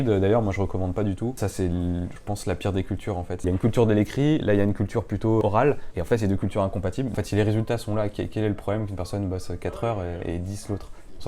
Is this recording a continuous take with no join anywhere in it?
no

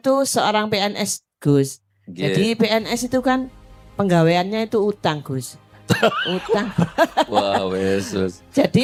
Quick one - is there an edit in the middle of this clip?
no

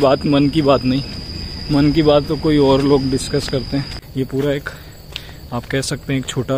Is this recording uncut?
no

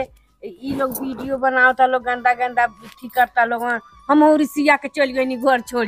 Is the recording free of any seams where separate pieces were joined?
yes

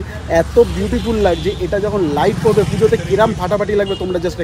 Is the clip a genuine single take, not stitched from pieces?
yes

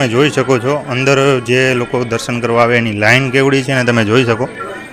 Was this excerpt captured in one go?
yes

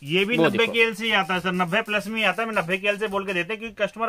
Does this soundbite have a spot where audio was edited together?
no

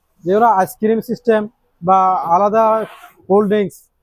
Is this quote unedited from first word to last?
yes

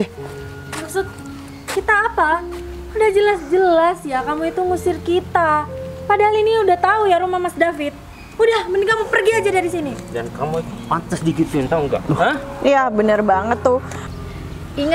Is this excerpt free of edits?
no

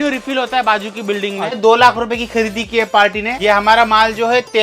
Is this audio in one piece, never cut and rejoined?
no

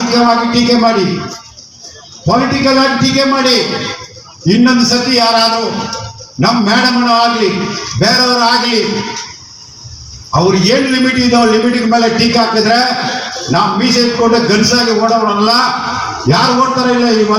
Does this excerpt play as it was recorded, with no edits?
yes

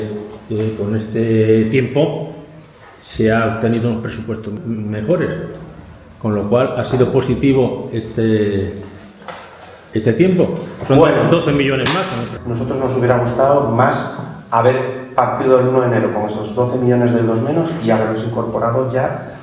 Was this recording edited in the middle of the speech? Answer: yes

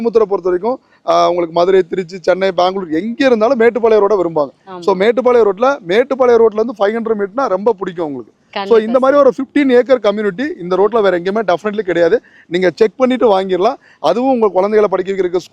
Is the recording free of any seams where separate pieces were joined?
yes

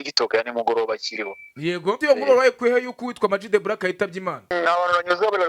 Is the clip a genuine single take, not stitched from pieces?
no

